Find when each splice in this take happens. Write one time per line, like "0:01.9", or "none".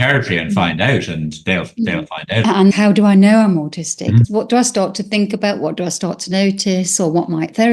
0:02.6
0:04.3